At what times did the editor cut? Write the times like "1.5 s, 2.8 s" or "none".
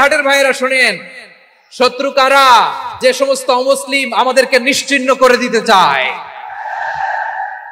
2.9 s